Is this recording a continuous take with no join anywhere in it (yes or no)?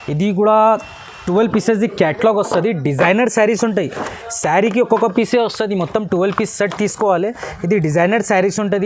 no